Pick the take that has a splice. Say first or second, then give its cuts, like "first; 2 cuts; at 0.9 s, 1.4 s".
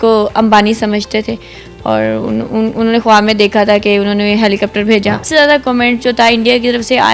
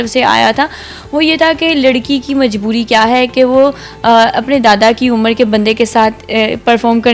first; 1 cut; at 5.2 s